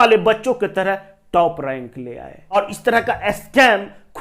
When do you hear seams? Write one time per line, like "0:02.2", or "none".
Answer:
0:02.5